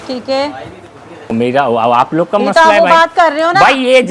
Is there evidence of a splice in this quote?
yes; 1 cut; at 1.3 s

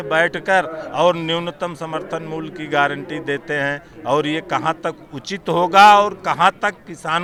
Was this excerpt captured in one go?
yes; 0 cuts

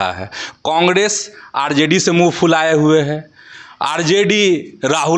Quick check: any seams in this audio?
no; 0 cuts

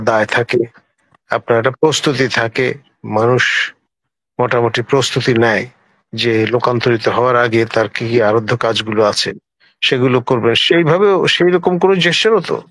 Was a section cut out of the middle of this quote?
no; 0 cuts

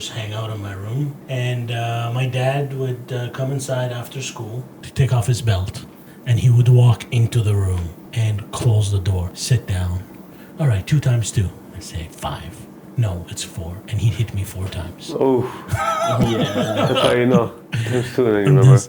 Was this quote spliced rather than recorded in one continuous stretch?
yes; 4 cuts; at 1.2 s, 4.8 s, 8.0 s, 9.3 s

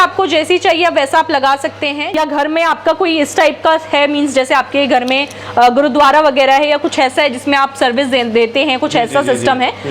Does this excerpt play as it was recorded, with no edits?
no; 1 cut; at 2.0 s

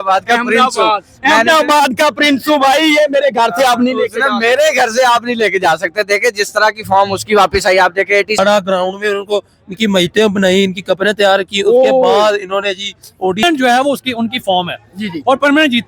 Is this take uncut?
no; 2 cuts; at 8.4 s, 13.4 s

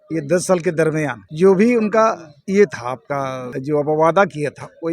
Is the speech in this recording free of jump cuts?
no; 3 cuts; at 1.2 s, 2.3 s, 3.5 s

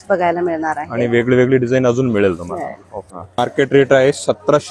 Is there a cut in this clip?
yes; 1 cut; at 3.4 s

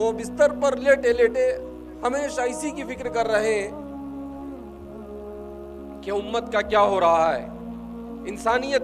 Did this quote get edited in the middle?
no; 0 cuts

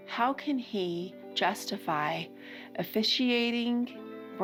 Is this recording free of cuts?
yes; 0 cuts

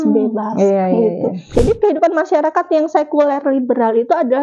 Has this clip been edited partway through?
yes; 1 cut; at 1.5 s

